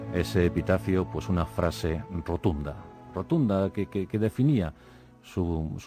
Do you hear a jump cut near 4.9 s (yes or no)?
no